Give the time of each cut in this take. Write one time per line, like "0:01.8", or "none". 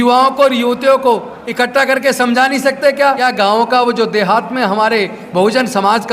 0:03.2